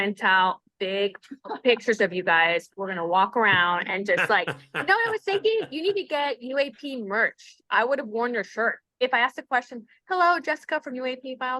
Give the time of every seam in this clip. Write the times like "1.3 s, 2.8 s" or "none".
9.0 s